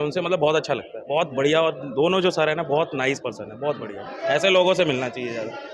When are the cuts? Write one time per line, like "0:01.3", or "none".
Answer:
none